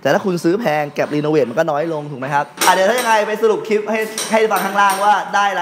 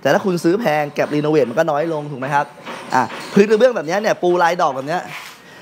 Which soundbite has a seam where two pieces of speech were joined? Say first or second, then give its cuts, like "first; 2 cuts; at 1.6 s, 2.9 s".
first; 1 cut; at 2.5 s